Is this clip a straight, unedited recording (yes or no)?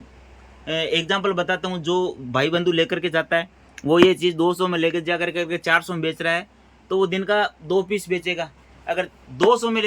yes